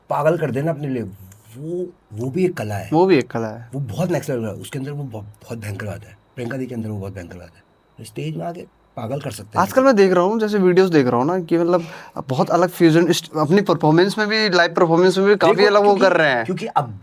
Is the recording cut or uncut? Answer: uncut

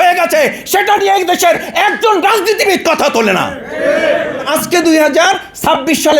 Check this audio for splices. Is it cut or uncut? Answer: cut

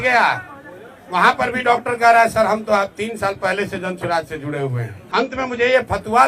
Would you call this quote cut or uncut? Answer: cut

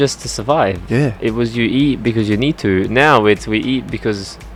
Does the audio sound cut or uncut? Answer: uncut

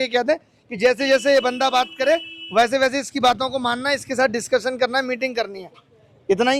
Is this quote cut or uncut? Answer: uncut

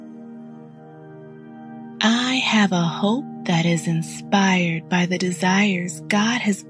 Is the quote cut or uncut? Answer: uncut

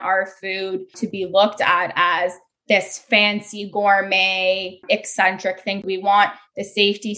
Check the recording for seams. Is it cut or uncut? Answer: cut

